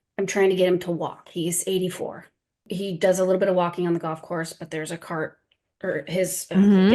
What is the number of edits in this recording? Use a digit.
1